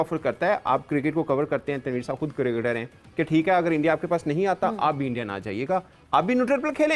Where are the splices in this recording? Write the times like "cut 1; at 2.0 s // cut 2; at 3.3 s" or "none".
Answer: none